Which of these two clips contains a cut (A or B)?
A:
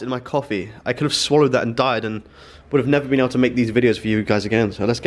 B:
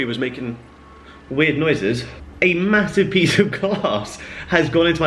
B